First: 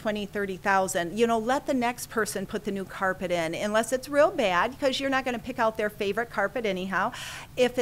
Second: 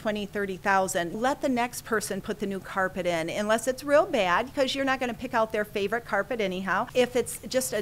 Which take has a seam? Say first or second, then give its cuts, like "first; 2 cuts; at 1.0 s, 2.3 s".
second; 2 cuts; at 1.2 s, 6.9 s